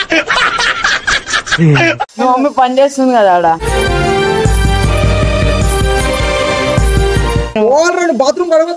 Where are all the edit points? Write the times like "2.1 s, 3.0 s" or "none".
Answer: 2.1 s, 7.5 s

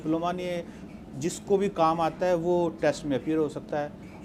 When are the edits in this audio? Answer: none

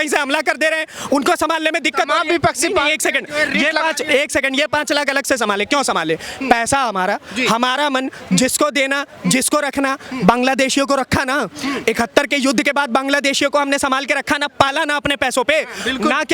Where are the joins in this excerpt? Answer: none

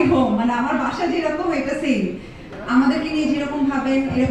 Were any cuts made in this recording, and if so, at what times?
2.4 s

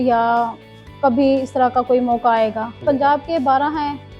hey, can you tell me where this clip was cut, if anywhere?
2.8 s

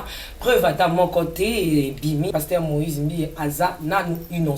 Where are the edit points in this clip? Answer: 2.3 s

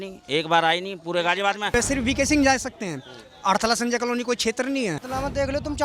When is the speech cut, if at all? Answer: 1.7 s, 5.0 s

